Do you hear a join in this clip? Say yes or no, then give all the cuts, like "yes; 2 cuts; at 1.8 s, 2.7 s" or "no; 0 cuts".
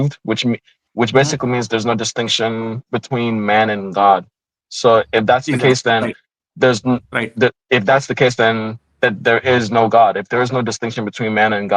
no; 0 cuts